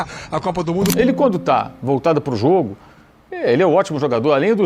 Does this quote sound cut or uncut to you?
cut